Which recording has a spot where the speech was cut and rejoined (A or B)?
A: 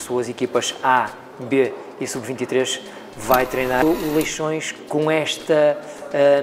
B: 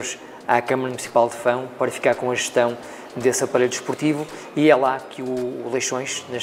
A